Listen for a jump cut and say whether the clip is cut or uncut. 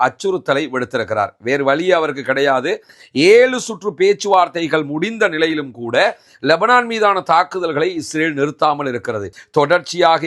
cut